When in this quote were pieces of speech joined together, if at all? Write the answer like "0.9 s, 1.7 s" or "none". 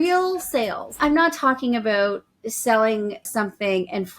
1.0 s, 3.3 s